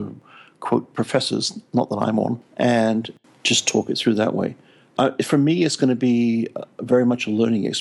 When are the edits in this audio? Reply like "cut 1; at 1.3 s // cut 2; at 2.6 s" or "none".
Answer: cut 1; at 4.9 s